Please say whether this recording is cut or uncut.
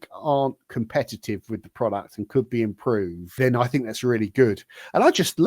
cut